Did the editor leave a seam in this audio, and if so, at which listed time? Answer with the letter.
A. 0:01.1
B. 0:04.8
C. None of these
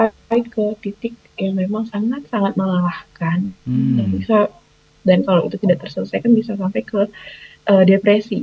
C